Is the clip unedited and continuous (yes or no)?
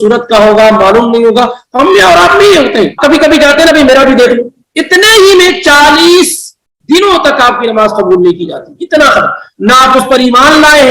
no